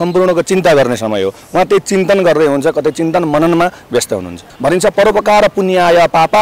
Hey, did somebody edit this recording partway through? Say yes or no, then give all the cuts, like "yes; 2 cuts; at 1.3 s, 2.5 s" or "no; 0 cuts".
yes; 1 cut; at 4.5 s